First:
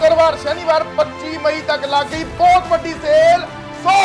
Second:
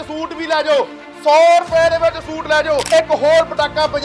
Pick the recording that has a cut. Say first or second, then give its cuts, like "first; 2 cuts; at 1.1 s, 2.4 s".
second; 1 cut; at 2.8 s